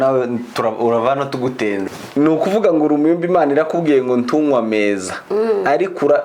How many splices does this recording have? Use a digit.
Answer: 1